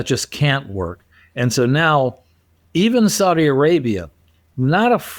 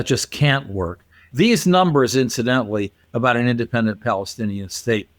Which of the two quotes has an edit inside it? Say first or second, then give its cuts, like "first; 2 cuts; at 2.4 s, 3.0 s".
second; 1 cut; at 1.2 s